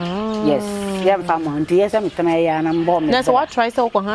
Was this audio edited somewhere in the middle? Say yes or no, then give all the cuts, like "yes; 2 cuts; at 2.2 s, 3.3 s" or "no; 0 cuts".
no; 0 cuts